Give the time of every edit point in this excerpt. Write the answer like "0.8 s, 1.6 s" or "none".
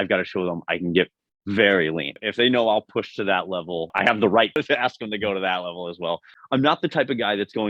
2.1 s, 3.9 s, 4.6 s, 6.3 s